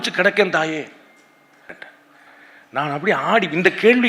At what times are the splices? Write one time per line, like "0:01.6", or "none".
0:01.6